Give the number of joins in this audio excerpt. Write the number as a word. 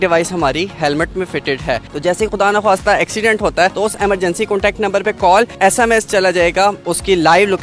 four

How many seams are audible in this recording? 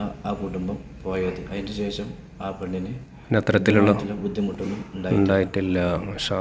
zero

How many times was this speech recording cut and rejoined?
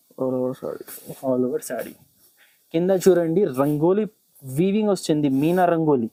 zero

